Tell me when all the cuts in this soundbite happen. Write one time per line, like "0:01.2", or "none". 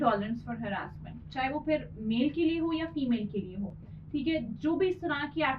none